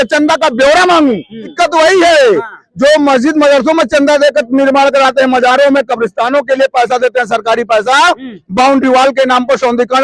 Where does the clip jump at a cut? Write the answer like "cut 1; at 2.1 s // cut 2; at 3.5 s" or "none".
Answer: cut 1; at 1.5 s